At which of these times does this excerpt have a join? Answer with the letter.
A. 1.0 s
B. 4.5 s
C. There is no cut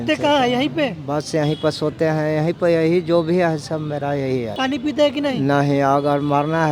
B